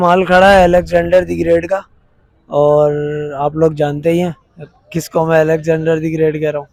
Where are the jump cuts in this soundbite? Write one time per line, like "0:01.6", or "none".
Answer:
none